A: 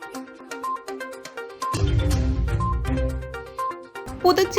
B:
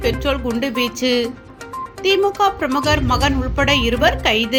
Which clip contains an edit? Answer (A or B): A